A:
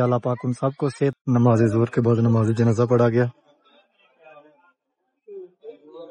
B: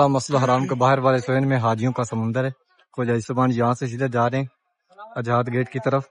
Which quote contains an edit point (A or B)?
A